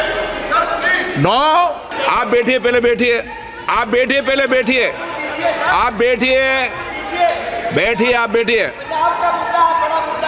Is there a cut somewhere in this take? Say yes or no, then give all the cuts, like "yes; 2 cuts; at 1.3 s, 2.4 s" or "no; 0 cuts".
yes; 1 cut; at 1.9 s